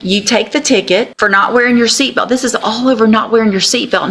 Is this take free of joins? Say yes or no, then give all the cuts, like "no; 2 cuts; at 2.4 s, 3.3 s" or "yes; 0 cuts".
no; 1 cut; at 1.1 s